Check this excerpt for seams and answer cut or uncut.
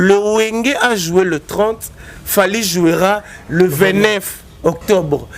uncut